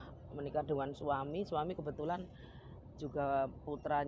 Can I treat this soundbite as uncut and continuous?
yes; 0 cuts

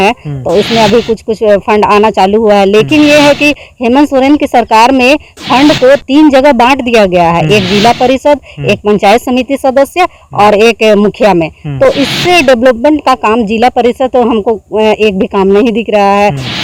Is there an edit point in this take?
no; 0 cuts

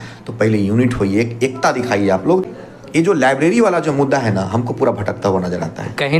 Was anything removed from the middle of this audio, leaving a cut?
yes; 1 cut; at 2.6 s

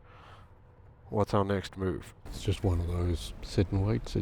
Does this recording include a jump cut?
yes; 1 cut; at 2.2 s

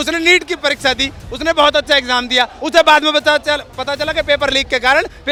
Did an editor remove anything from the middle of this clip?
no; 0 cuts

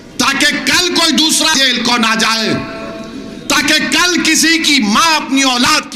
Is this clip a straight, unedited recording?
no; 1 cut; at 1.5 s

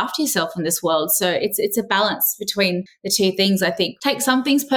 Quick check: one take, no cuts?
no; 2 cuts; at 3.0 s, 4.0 s

